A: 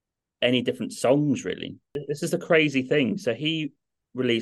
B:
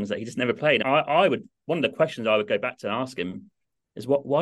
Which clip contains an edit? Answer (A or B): A